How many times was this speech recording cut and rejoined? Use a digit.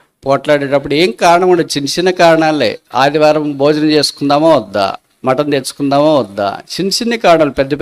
0